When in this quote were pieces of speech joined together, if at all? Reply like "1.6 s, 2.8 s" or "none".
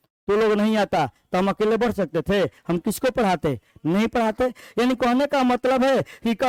none